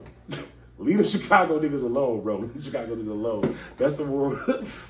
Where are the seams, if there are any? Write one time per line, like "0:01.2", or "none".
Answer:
none